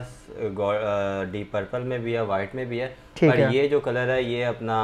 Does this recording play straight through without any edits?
yes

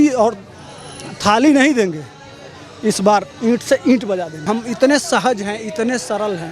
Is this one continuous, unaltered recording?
no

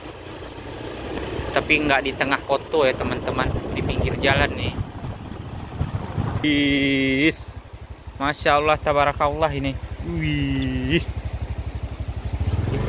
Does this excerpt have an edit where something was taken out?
yes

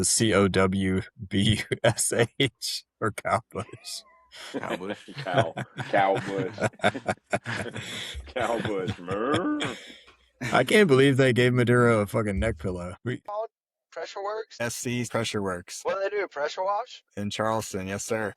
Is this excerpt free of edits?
no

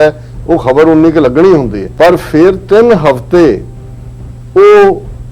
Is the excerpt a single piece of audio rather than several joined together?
no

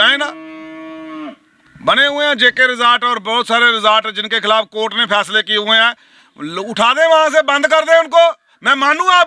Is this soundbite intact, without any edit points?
yes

